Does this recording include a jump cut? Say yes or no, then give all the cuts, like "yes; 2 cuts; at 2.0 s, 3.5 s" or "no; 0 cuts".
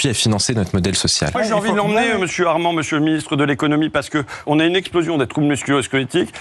yes; 2 cuts; at 1.4 s, 4.4 s